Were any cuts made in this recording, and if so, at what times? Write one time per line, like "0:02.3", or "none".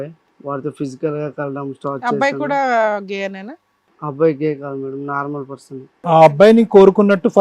0:06.0